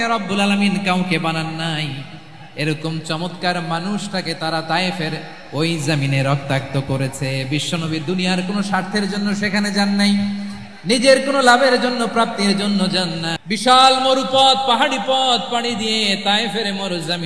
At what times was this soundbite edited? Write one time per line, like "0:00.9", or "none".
0:13.3